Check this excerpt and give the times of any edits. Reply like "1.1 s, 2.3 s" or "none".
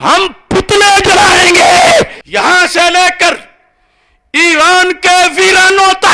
2.2 s